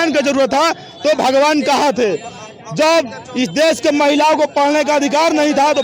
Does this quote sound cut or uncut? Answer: uncut